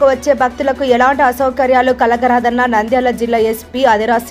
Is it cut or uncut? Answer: uncut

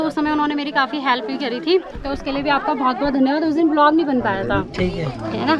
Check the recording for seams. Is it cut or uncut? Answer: uncut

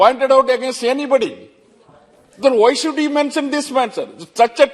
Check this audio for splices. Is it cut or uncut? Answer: uncut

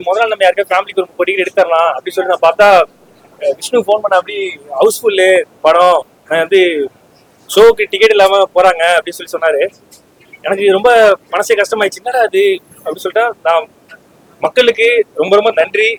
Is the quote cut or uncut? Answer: uncut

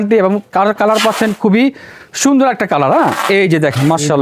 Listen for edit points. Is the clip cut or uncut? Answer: uncut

